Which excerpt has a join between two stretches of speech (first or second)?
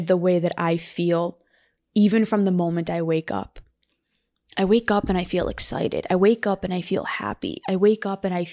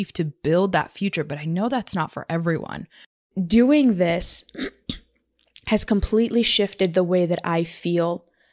second